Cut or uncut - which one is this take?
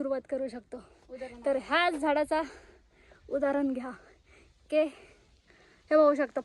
uncut